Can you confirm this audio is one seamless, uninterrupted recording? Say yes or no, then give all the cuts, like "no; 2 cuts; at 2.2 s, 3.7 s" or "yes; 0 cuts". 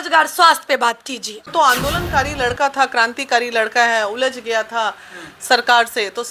no; 1 cut; at 1.5 s